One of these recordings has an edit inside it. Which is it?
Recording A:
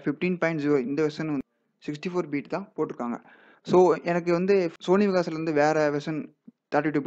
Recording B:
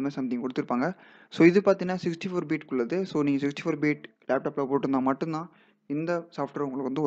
A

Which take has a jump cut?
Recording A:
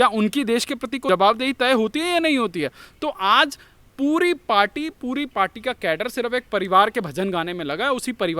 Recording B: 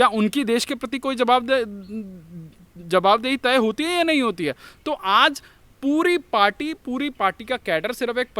A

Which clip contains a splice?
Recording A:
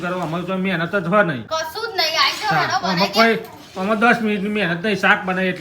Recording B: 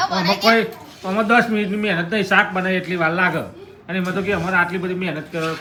A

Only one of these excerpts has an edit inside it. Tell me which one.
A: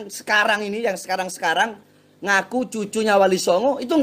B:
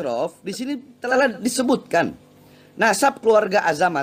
B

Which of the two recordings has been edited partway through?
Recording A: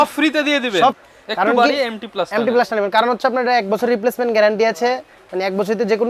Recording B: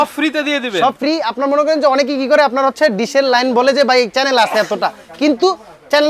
A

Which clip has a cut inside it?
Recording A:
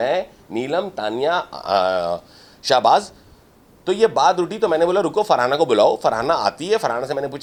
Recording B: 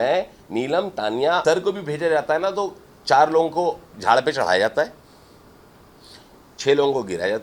B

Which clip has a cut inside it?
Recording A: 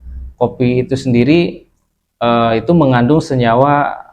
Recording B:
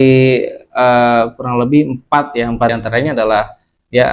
B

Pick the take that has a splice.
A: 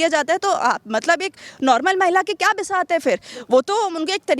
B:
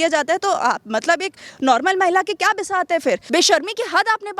B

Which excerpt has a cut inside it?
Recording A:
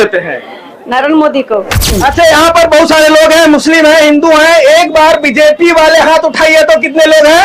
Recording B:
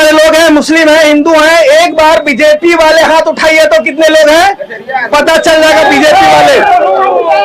A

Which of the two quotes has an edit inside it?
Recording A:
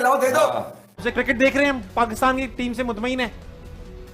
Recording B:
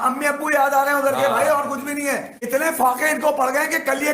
A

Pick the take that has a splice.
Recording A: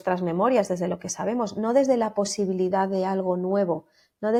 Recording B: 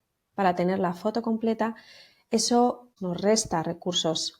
B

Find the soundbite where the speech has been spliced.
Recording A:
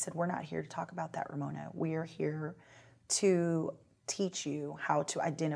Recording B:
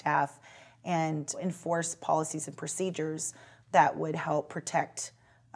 B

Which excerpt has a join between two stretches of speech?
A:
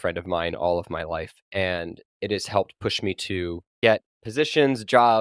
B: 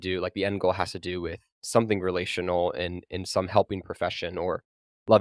A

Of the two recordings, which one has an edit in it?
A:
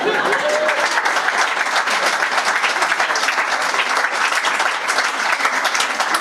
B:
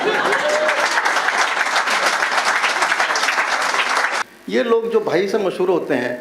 B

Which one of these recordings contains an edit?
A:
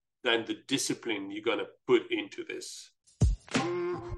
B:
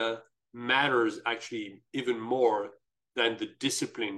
A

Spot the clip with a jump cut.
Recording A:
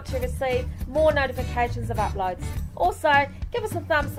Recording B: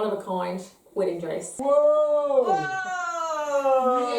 B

